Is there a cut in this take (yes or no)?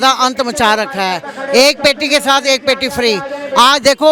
no